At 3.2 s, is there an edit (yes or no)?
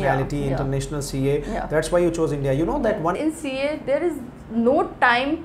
yes